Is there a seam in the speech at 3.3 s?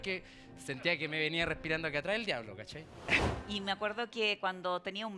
yes; 1 cut; at 3.3 s

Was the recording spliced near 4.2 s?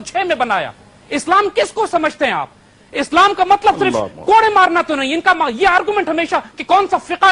no; 0 cuts

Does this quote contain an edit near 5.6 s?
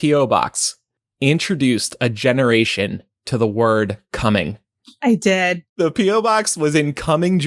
yes; 1 cut; at 5.6 s

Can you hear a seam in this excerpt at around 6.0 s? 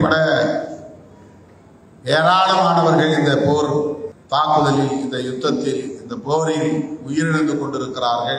no; 1 cut; at 4.1 s

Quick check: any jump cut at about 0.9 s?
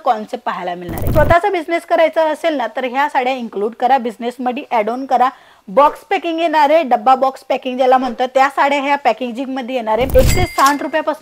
yes; 2 cuts; at 0.9 s, 10.1 s

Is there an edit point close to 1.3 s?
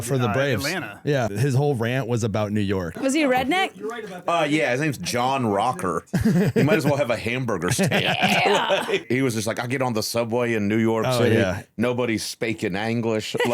yes; 3 cuts; at 1.3 s, 3.0 s, 9.0 s

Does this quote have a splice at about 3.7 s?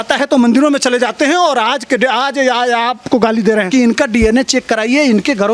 yes; 1 cut; at 3.7 s

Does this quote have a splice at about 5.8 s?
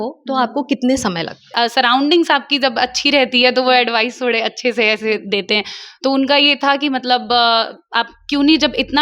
no; 1 cut; at 1.5 s

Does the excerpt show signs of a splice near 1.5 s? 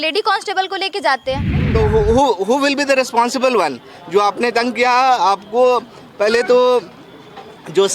yes; 1 cut; at 1.5 s

